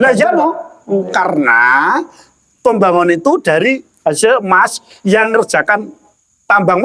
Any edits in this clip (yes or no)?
no